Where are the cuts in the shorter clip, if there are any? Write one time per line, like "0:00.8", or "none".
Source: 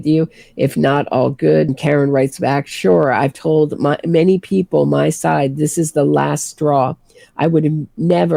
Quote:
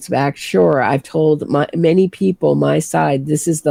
none